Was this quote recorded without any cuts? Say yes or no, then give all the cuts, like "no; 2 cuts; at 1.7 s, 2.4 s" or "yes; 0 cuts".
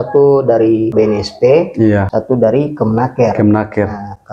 no; 2 cuts; at 0.9 s, 2.1 s